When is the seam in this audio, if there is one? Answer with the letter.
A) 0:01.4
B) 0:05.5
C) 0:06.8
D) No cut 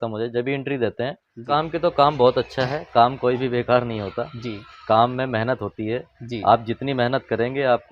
A